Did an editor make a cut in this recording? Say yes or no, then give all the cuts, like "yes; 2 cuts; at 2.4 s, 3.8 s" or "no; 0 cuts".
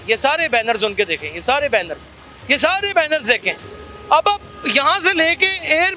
no; 0 cuts